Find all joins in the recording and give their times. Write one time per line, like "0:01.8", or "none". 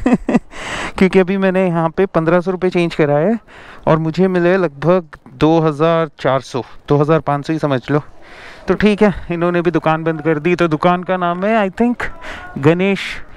none

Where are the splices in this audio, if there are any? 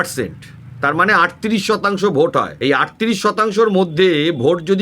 0:02.5

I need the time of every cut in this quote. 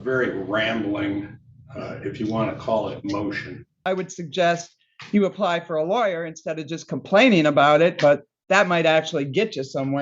0:03.8

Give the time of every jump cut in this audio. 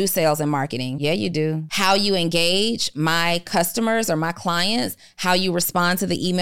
0:00.9
0:01.7

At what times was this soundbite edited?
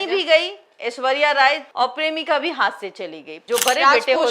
0:01.7
0:03.4

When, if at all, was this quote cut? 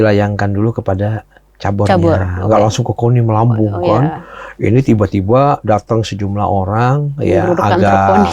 none

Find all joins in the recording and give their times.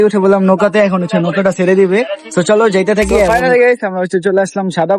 0:03.3

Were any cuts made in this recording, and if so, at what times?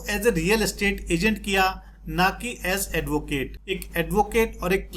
0:03.6

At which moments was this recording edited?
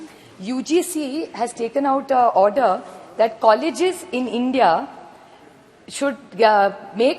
none

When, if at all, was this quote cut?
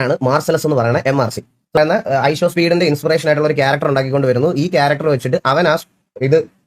0:01.8

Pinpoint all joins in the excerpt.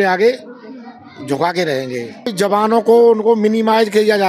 0:02.3

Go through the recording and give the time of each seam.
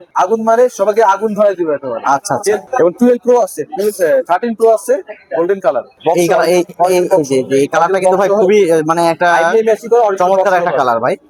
none

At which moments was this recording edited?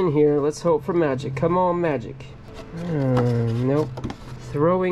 none

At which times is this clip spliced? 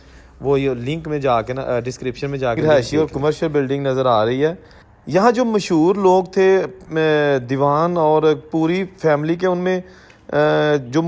0:02.6

